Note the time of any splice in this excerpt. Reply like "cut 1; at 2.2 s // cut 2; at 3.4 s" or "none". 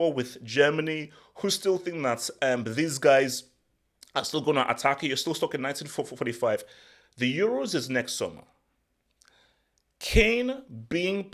none